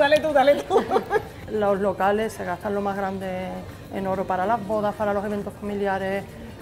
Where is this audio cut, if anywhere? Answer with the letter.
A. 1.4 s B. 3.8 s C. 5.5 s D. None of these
D